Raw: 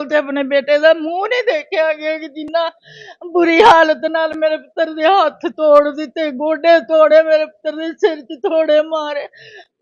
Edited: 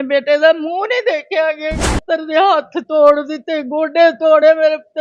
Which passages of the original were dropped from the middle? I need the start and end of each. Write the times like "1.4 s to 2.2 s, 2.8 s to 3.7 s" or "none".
2.4 s to 4.7 s